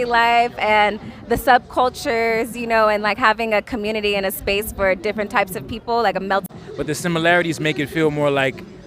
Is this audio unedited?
no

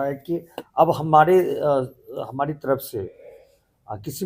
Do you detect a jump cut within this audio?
no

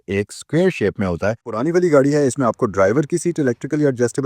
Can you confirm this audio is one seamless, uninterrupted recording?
no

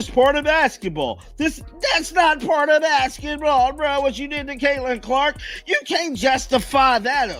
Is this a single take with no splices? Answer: yes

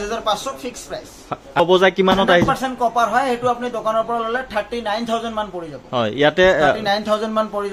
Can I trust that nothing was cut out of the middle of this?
no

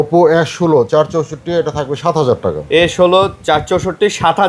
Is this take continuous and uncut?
yes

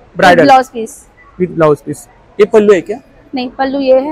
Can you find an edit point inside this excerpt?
no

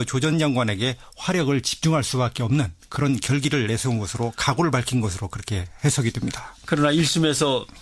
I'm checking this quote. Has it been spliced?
yes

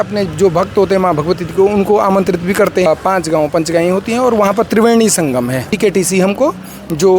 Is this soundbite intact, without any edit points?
no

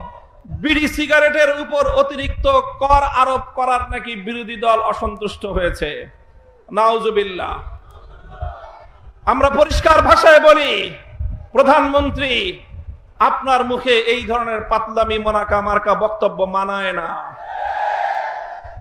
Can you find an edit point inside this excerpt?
no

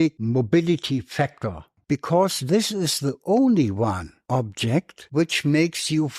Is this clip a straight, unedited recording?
no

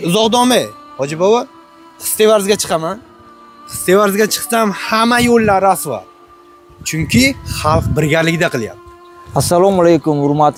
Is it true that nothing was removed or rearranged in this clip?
yes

